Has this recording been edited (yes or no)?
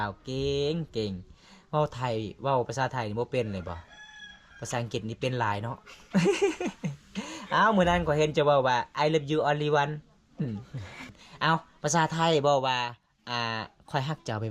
yes